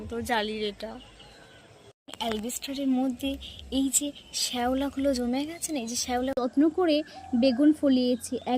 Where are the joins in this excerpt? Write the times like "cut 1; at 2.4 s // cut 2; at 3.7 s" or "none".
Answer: cut 1; at 6.4 s